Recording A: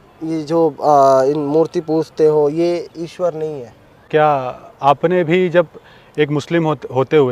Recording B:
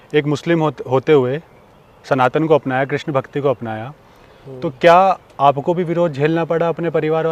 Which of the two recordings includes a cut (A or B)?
A